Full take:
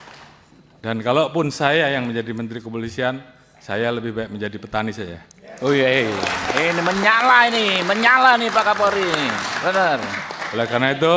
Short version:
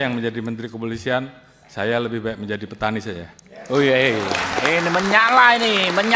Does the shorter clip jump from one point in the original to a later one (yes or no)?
no